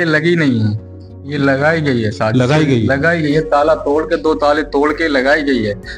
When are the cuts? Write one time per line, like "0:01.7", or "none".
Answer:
none

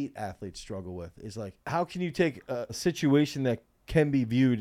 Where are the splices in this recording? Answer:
0:01.6
0:02.8

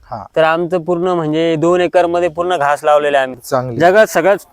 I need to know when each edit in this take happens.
0:03.4

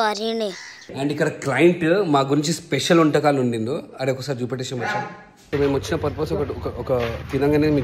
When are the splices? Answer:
0:00.9
0:05.4

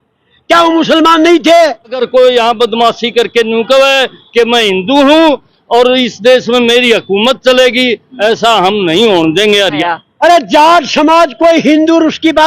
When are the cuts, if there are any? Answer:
0:02.0
0:09.8

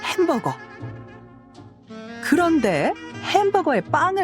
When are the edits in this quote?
0:03.1

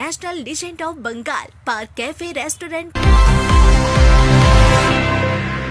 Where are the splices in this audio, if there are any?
0:02.9

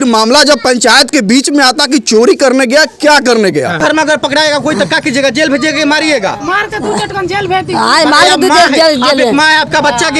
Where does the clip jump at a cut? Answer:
0:03.8

